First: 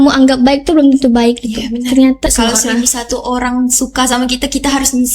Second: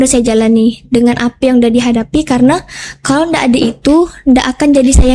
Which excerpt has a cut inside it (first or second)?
first